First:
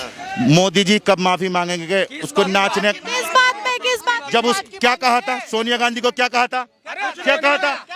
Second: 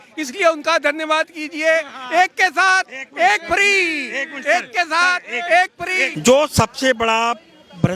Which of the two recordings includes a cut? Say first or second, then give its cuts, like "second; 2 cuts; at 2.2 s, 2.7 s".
second; 1 cut; at 6.1 s